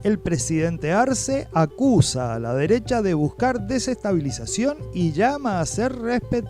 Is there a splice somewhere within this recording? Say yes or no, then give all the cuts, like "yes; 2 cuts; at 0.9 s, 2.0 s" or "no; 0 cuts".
no; 0 cuts